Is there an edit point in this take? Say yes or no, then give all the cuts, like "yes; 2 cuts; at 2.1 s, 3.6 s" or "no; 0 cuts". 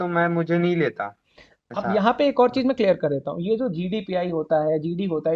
no; 0 cuts